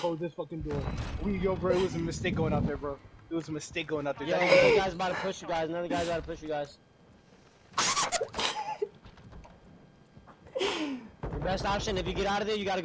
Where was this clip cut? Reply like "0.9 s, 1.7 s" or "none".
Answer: none